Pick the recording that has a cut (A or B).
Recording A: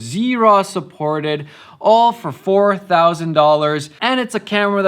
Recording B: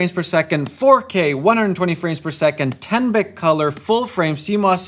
A